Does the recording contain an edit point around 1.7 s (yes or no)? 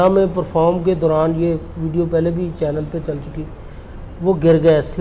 no